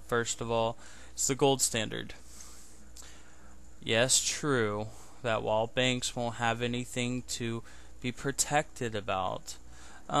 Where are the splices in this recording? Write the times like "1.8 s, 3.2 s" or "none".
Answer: none